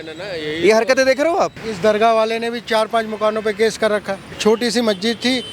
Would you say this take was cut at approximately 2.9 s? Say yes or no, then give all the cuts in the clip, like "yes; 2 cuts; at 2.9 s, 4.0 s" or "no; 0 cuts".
no; 2 cuts; at 1.6 s, 4.2 s